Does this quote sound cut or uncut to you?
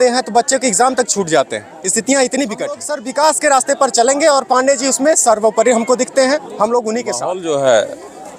cut